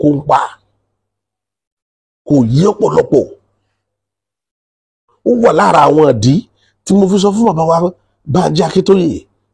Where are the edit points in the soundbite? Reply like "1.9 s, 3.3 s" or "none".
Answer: none